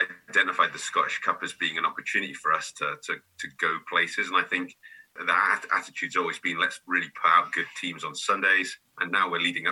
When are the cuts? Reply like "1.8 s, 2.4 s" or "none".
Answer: 5.1 s

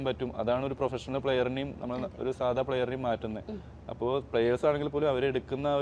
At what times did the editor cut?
none

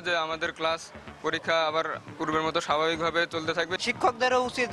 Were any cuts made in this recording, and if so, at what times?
3.7 s

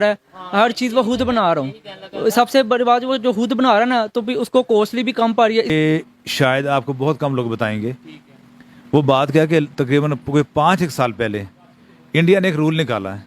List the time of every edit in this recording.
5.7 s

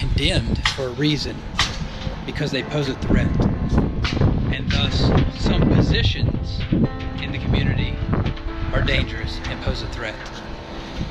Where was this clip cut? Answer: none

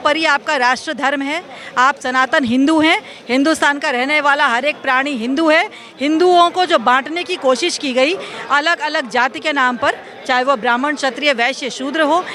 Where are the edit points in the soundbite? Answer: none

